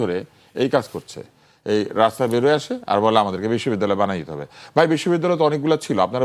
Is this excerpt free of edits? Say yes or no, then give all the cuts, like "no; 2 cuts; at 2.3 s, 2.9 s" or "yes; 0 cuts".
yes; 0 cuts